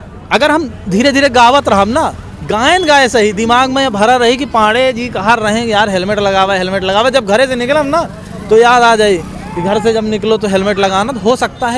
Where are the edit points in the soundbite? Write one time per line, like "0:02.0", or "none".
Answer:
none